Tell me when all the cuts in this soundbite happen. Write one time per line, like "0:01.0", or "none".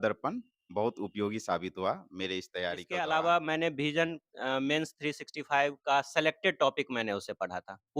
0:02.8

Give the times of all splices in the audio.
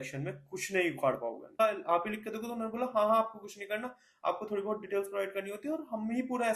0:01.6

